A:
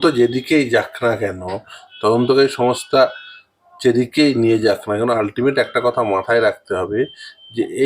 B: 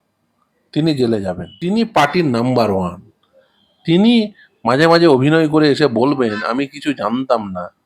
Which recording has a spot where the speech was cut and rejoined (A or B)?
B